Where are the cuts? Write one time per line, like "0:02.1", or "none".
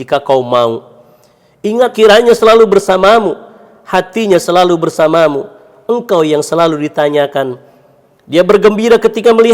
0:01.9